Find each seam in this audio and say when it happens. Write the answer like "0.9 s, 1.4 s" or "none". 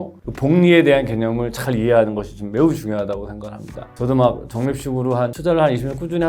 3.9 s, 5.3 s

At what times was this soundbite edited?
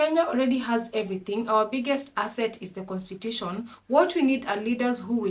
none

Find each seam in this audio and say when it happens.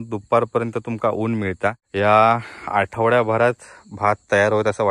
1.8 s

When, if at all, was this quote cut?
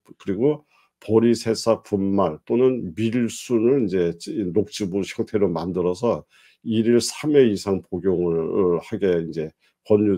none

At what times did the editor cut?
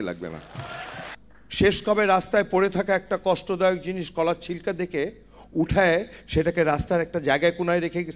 1.0 s

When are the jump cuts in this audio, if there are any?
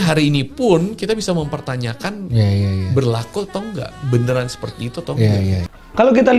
none

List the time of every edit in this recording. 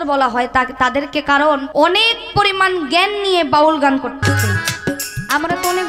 1.7 s, 4.2 s

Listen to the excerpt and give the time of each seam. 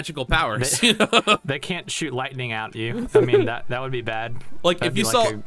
none

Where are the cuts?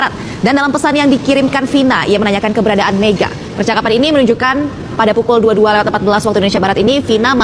none

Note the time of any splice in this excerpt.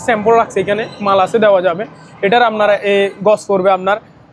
none

